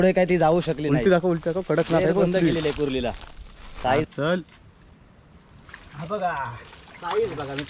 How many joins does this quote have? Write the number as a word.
one